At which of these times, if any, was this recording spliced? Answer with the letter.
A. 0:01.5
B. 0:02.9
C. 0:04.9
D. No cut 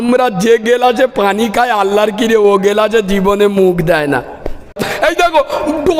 C